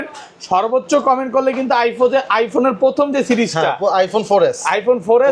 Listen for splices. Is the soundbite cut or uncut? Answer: uncut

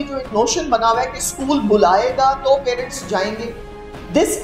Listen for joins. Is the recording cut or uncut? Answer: uncut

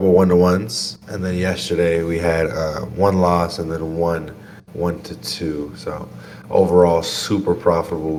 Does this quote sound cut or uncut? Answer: uncut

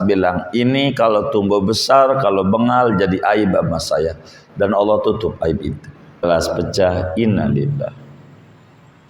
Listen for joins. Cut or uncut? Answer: cut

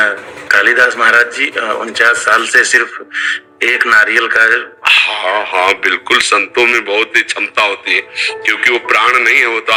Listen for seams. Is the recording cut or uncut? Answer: uncut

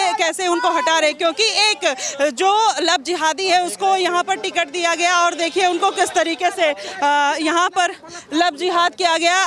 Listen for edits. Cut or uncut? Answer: uncut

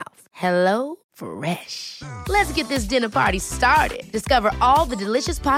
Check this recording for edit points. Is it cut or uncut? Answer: uncut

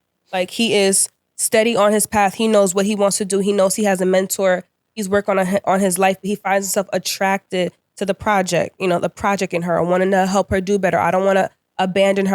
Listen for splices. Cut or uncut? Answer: uncut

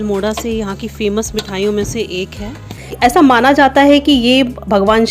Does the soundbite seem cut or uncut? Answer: cut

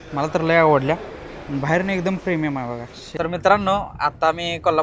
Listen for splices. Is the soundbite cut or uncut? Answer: cut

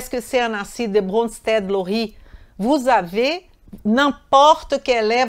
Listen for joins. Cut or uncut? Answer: uncut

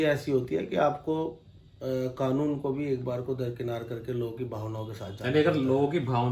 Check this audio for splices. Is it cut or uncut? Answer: uncut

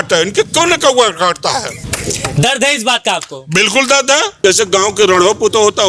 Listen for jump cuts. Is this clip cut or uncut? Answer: cut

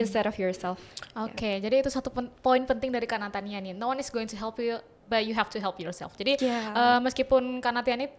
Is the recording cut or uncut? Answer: uncut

